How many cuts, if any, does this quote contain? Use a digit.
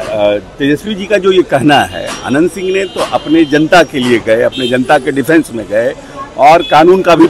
0